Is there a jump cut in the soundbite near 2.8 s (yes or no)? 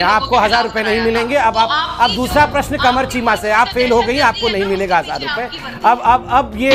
no